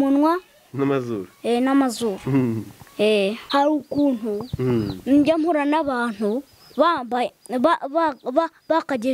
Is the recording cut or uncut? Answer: cut